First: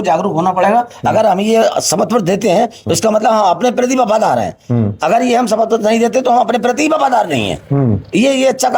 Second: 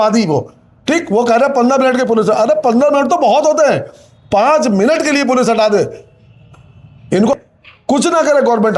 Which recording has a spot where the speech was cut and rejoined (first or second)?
second